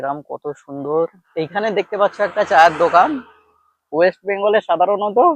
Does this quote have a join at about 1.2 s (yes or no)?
yes